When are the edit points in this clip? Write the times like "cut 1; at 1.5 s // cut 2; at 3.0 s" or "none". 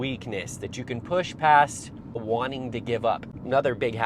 cut 1; at 2.2 s // cut 2; at 3.2 s